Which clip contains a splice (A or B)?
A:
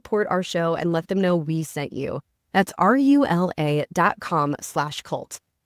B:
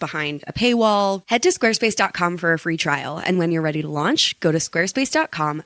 B